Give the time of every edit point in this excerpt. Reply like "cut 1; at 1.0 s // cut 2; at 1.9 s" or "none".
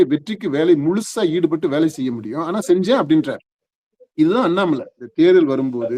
cut 1; at 5.0 s